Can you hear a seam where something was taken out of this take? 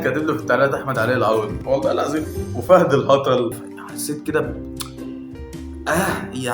yes; 2 cuts; at 1.6 s, 3.6 s

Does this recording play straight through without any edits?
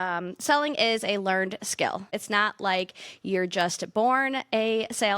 no; 1 cut; at 2.2 s

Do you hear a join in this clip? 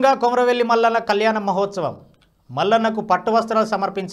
no; 0 cuts

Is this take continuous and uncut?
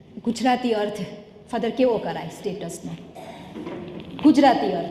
yes; 0 cuts

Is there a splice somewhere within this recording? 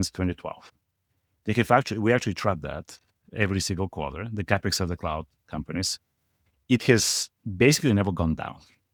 no; 0 cuts

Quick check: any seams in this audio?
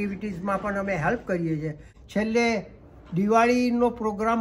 no; 0 cuts

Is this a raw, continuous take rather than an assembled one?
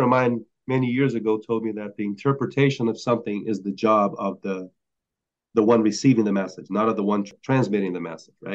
no; 1 cut; at 7.3 s

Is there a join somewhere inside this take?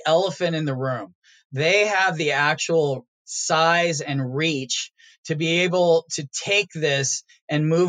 no; 0 cuts

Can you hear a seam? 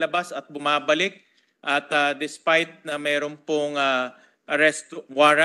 no; 0 cuts

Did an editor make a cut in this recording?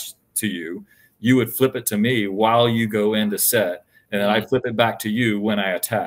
no; 0 cuts

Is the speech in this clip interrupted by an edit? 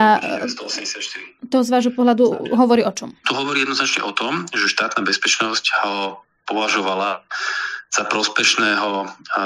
no; 0 cuts

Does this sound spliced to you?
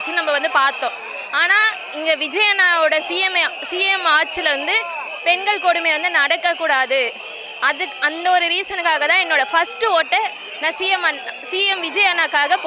no; 0 cuts

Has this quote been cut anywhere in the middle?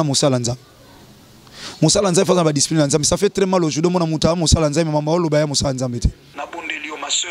yes; 1 cut; at 6.2 s

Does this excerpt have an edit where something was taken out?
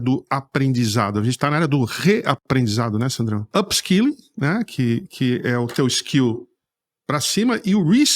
yes; 1 cut; at 3.5 s

